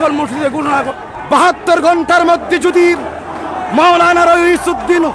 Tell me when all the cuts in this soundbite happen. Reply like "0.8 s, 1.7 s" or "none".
0.9 s